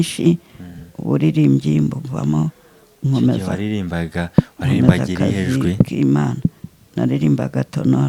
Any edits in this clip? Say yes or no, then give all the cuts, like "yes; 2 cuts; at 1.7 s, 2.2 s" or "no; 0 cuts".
no; 0 cuts